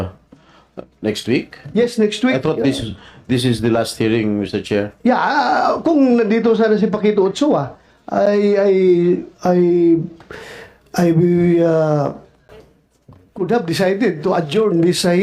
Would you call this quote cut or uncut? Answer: uncut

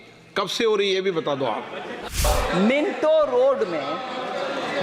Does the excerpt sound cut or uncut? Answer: cut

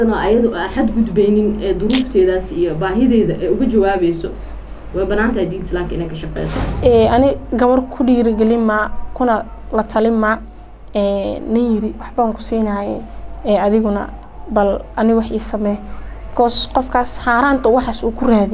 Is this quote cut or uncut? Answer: cut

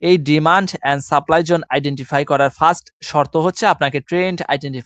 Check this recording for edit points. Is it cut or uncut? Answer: uncut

